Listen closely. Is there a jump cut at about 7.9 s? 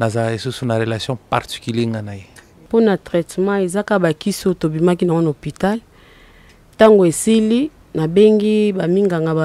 no; 1 cut; at 2.6 s

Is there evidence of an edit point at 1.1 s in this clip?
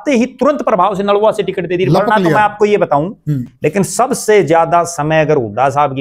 no; 1 cut; at 3.5 s

